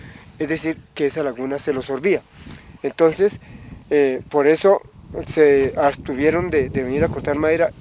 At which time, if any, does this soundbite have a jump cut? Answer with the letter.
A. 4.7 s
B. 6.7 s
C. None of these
B